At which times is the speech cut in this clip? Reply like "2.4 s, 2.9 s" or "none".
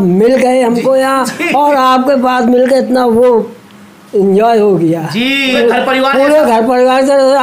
5.6 s